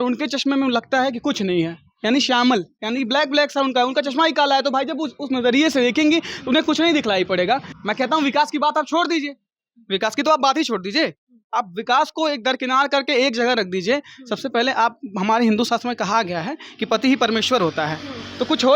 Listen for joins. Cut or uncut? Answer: cut